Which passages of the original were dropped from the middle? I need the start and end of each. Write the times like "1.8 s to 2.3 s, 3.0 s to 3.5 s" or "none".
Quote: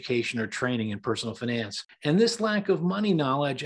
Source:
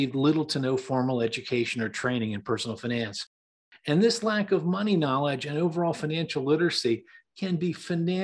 3.3 s to 3.7 s